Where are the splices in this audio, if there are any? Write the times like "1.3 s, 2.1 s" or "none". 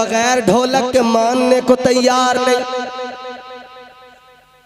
none